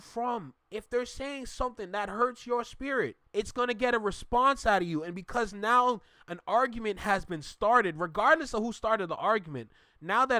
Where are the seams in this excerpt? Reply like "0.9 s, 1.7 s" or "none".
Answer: 3.2 s